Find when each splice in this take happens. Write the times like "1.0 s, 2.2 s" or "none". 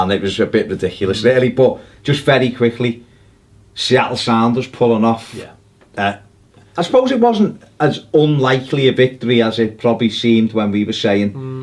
none

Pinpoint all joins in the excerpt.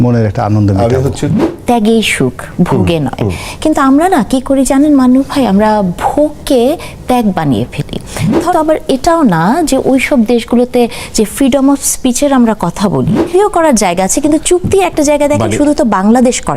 1.5 s, 8.5 s, 13.3 s

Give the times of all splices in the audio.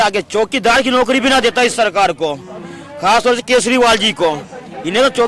none

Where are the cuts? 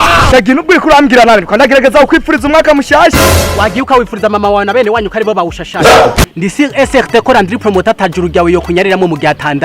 6.3 s

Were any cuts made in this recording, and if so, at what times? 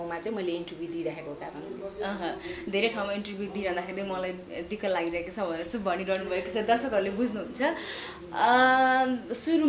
none

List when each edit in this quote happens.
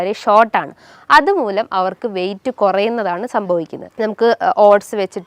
3.8 s

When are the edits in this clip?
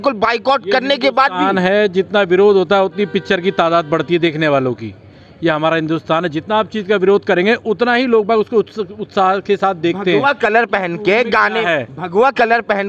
none

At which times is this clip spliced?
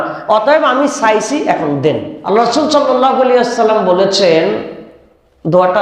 2.2 s

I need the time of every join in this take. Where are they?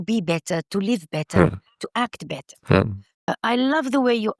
3.1 s

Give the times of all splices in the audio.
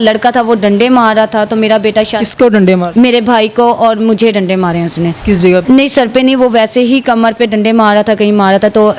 none

